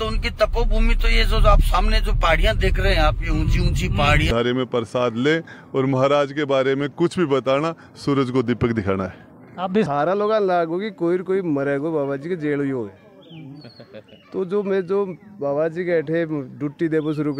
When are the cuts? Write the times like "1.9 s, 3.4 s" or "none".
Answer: 4.3 s, 9.9 s